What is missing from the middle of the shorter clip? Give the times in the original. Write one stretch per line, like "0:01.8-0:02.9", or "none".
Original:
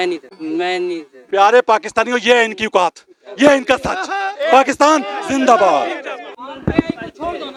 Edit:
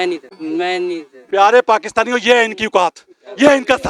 none